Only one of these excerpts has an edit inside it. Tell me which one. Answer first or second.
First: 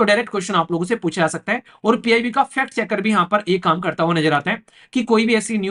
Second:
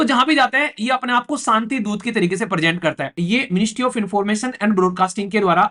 second